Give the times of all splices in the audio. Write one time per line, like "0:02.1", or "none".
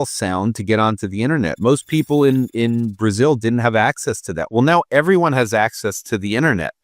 none